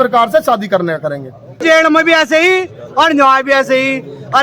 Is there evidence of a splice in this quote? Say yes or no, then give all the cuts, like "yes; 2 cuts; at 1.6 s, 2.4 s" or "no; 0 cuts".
yes; 1 cut; at 1.6 s